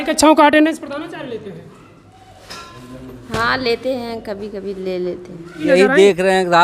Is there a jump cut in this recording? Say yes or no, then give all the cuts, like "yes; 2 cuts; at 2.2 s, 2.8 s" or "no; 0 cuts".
yes; 1 cut; at 5.7 s